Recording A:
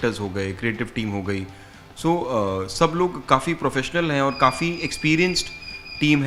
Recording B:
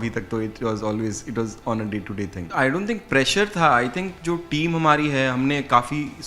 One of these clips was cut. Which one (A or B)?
B